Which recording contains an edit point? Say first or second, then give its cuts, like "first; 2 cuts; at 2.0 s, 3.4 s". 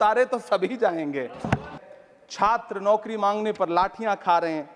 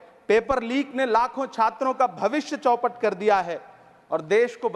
first; 1 cut; at 1.7 s